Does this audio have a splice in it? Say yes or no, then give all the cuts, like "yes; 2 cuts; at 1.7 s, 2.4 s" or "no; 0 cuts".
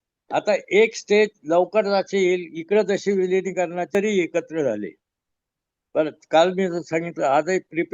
yes; 1 cut; at 3.9 s